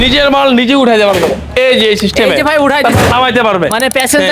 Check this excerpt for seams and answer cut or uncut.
uncut